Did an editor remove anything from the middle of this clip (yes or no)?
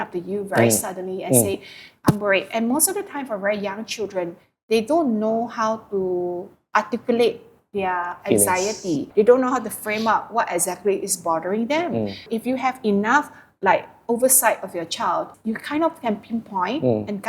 yes